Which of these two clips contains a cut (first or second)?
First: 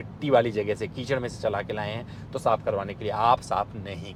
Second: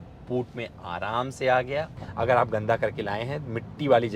second